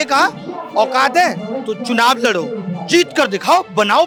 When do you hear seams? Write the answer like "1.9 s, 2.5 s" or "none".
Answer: none